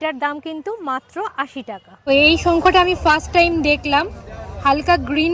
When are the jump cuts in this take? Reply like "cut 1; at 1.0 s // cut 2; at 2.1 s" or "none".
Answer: cut 1; at 2.0 s